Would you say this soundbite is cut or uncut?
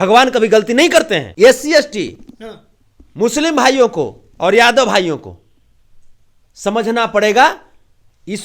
cut